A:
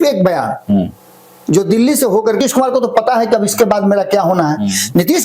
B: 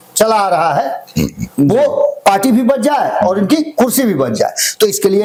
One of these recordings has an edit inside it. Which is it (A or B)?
A